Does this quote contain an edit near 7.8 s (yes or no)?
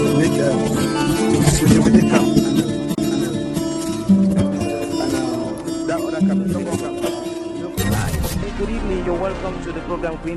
yes